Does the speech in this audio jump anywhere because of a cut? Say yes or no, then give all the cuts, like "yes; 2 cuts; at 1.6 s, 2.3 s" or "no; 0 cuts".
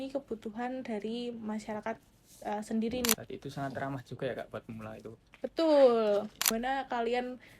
yes; 2 cuts; at 3.1 s, 6.5 s